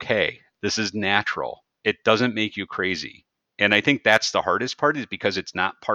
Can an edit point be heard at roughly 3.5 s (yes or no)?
no